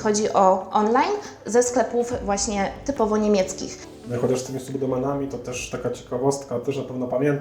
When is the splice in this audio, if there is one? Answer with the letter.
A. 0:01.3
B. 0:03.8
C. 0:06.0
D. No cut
B